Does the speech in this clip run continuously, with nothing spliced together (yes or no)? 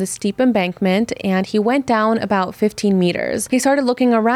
no